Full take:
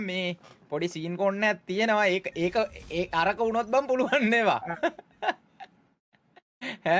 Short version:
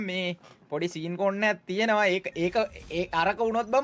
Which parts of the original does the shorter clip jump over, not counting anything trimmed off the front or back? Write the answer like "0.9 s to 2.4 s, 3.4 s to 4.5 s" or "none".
none